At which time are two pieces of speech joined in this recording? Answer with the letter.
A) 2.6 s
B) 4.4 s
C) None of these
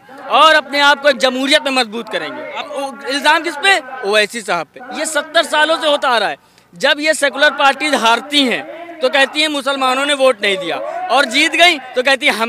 A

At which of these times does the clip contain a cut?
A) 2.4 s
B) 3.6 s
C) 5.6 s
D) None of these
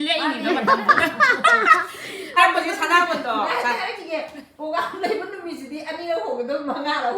A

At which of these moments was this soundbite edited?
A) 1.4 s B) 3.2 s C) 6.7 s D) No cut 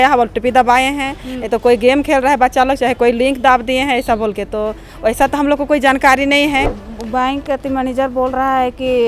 C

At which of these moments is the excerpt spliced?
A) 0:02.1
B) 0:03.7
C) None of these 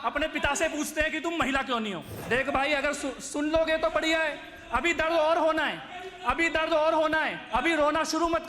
A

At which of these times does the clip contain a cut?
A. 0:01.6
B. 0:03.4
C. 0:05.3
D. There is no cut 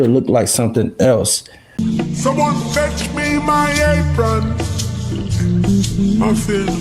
A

